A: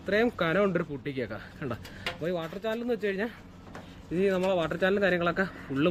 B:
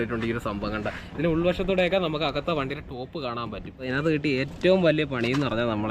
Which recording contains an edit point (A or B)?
B